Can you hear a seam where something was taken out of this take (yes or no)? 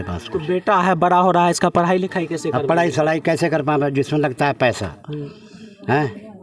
no